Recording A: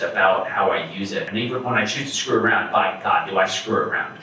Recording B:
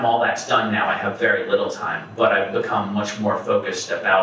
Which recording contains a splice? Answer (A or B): A